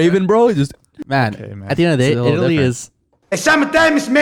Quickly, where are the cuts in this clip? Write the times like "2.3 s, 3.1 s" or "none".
1.0 s